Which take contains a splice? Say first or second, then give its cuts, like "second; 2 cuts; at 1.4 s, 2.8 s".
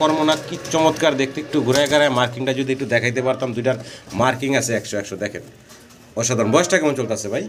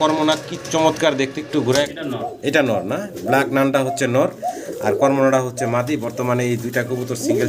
second; 1 cut; at 1.9 s